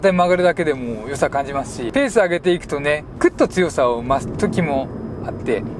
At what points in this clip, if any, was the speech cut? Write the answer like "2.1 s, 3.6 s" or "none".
1.8 s, 3.1 s